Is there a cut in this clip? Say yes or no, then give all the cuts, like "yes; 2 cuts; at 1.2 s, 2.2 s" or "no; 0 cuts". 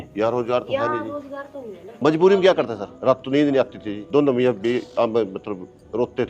yes; 1 cut; at 1.9 s